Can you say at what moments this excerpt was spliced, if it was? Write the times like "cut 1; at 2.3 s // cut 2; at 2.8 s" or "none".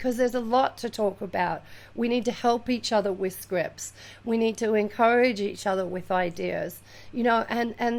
none